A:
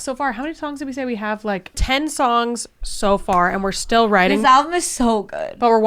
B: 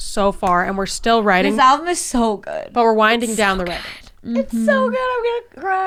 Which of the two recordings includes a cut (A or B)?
A